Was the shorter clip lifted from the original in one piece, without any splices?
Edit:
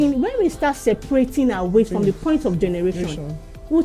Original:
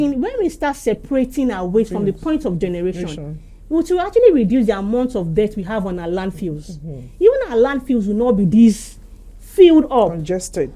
yes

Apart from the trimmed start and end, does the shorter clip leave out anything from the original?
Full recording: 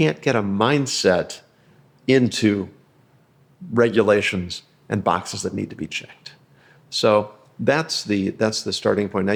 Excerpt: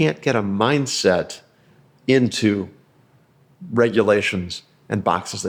no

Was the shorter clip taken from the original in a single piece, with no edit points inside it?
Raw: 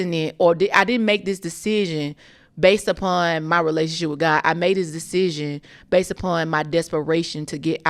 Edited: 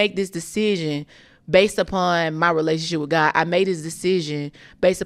yes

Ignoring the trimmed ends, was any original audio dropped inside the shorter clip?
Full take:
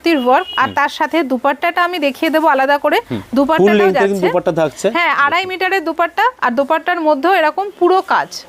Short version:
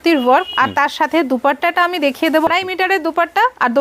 yes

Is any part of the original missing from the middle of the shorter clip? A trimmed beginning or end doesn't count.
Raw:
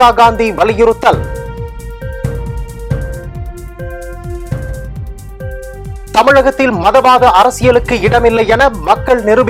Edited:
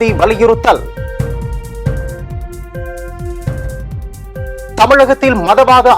yes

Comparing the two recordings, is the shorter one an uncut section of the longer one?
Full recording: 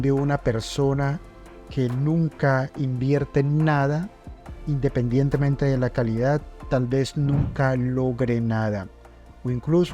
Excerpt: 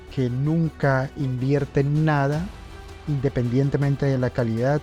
yes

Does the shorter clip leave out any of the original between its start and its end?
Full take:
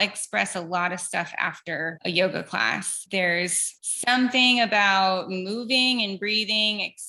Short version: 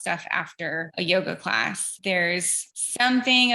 no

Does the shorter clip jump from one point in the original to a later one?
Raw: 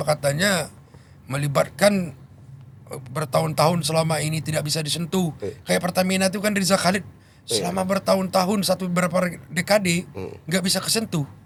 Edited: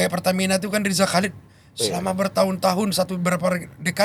no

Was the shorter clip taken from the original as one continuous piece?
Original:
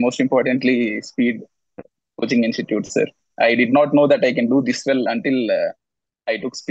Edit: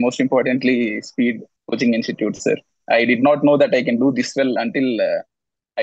no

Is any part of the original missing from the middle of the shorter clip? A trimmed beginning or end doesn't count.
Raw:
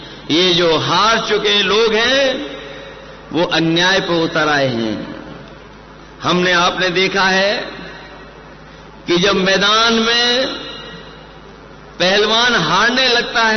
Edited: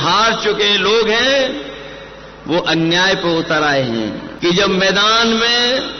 yes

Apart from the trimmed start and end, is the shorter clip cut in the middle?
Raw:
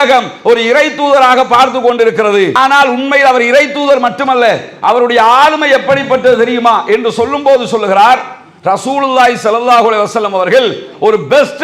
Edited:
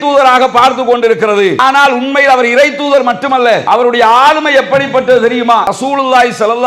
yes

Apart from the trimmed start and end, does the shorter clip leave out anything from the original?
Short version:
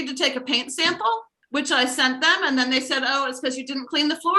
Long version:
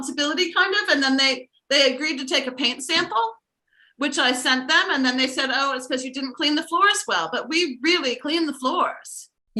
yes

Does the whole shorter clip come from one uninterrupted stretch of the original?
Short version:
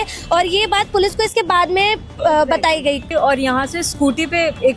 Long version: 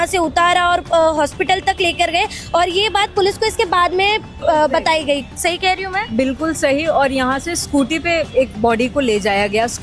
no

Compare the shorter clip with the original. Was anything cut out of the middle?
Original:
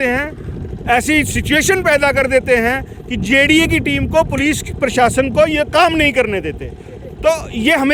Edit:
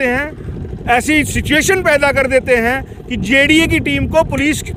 no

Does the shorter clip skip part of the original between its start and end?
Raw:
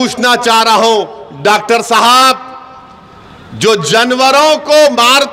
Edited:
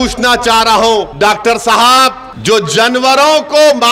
yes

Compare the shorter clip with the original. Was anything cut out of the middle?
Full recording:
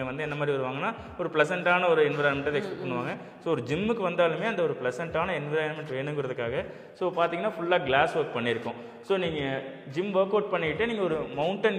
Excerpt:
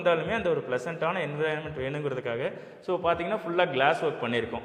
no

